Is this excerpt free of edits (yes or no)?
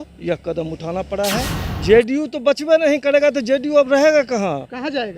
no